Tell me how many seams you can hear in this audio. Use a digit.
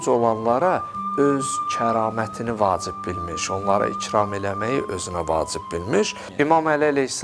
1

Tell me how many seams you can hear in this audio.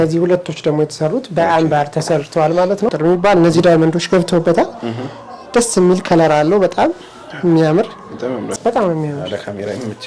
2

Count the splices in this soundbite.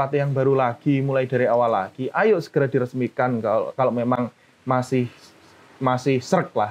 0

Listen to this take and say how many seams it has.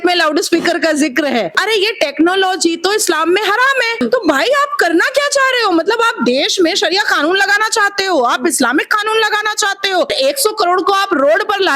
3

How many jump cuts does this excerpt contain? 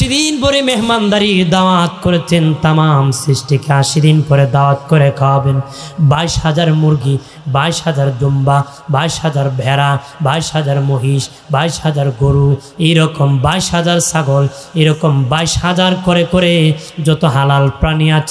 0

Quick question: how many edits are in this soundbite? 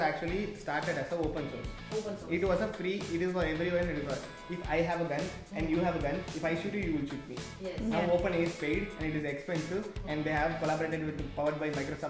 0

